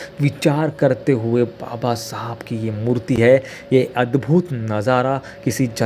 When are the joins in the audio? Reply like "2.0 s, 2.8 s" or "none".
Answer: none

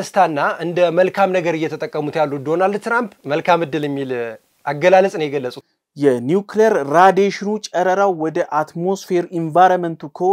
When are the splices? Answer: 3.1 s, 5.6 s

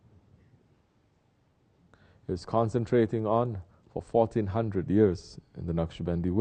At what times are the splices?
none

